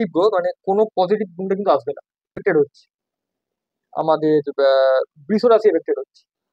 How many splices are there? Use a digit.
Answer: 1